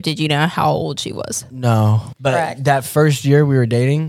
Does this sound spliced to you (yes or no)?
yes